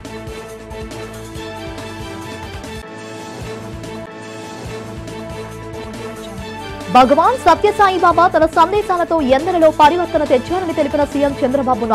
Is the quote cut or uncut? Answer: cut